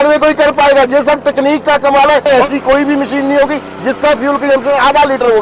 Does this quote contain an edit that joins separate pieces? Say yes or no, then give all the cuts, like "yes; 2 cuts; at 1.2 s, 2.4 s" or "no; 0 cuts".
yes; 1 cut; at 2.2 s